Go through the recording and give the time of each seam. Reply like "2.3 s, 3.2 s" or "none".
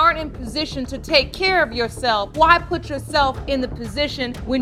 none

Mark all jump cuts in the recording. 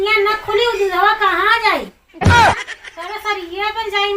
2.0 s, 2.6 s

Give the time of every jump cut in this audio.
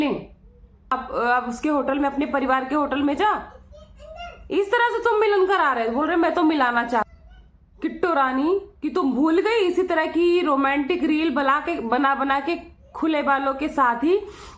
0.9 s, 7.1 s

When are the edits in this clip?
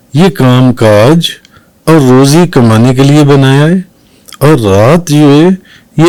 none

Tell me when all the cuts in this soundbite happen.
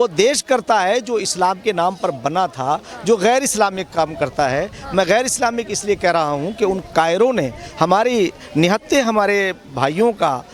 none

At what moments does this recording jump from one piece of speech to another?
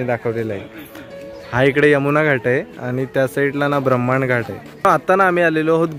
4.8 s

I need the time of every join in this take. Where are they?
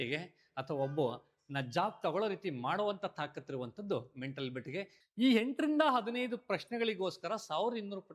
5.0 s

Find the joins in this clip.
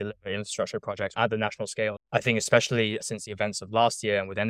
1.1 s, 2.0 s

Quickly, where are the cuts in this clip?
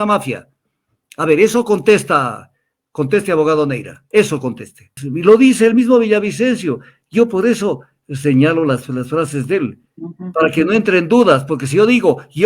4.9 s

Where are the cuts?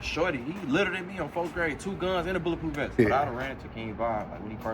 2.8 s

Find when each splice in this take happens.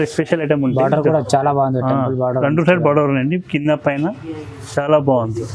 none

